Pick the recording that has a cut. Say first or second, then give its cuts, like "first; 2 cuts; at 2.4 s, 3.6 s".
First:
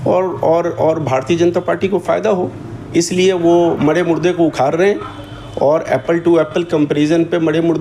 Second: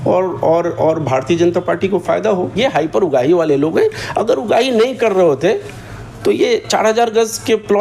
second; 1 cut; at 2.6 s